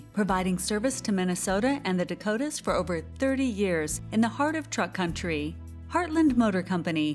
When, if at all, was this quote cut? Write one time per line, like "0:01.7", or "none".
none